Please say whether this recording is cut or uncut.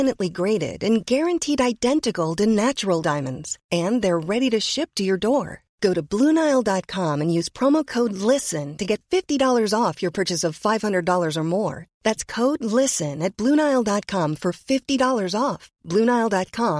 uncut